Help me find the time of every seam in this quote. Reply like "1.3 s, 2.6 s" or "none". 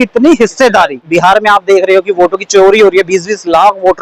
1.0 s